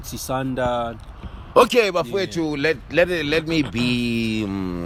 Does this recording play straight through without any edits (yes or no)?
yes